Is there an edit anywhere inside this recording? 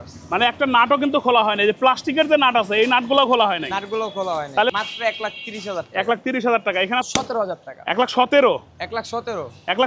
yes; 2 cuts; at 4.7 s, 7.1 s

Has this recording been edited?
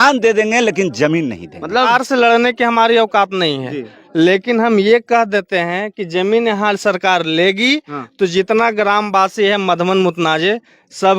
yes; 1 cut; at 1.9 s

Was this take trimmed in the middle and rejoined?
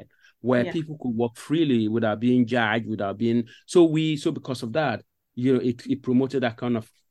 no; 0 cuts

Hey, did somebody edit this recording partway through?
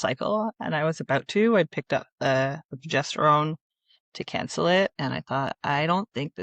no; 0 cuts

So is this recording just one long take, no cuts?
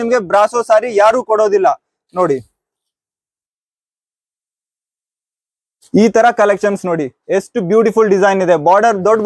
yes; 0 cuts

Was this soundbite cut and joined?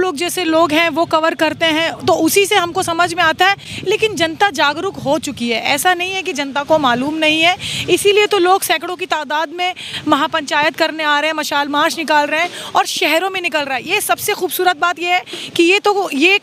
no; 0 cuts

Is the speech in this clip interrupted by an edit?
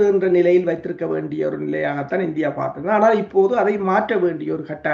no; 0 cuts

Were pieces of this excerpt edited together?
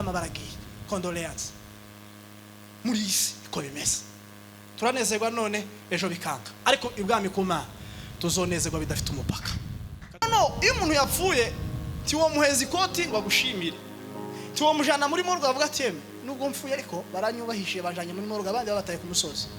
yes; 1 cut; at 10.2 s

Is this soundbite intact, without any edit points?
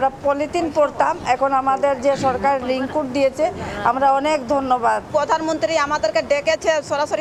yes; 0 cuts

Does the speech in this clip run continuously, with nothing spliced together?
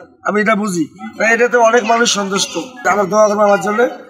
no; 1 cut; at 2.8 s

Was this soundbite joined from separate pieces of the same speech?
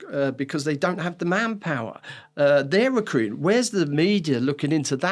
no; 0 cuts

